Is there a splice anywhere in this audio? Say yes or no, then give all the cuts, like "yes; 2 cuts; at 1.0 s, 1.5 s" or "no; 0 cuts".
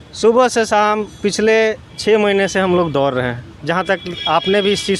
no; 0 cuts